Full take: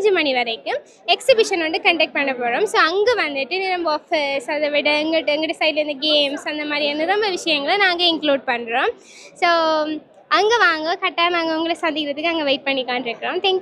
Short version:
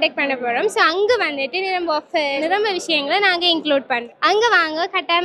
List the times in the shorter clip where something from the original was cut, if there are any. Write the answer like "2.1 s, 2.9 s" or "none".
2.4 s, 4.1 s